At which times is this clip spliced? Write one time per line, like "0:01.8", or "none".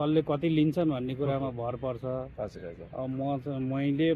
none